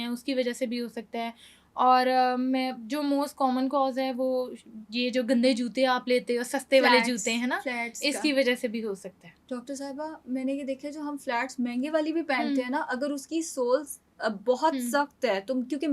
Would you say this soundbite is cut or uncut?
uncut